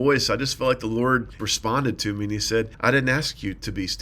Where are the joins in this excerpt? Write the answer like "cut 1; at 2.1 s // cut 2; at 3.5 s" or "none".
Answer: cut 1; at 1.4 s // cut 2; at 2.7 s